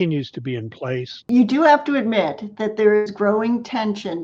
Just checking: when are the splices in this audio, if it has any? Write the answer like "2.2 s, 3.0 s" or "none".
1.2 s